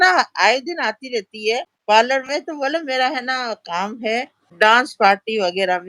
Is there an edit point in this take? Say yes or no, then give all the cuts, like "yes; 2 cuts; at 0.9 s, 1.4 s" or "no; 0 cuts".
yes; 2 cuts; at 1.7 s, 4.4 s